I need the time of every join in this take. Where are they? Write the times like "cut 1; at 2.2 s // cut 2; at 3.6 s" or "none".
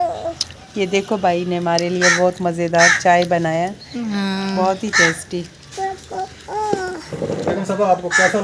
cut 1; at 7.5 s